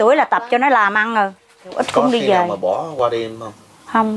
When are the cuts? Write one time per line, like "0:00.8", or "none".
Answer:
0:01.8